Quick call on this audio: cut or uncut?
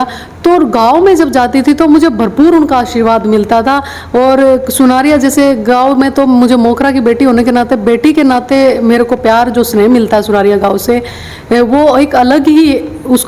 uncut